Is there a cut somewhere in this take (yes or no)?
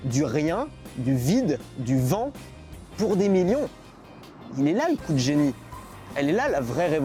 no